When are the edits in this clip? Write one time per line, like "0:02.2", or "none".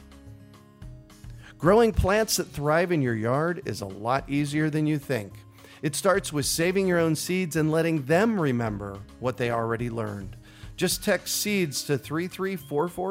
0:01.4